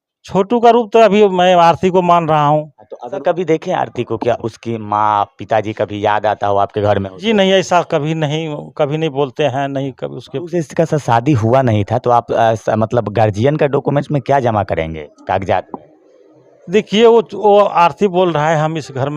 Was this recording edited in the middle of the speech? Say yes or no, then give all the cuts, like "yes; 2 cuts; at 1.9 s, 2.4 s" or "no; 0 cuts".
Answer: yes; 2 cuts; at 3.2 s, 10.3 s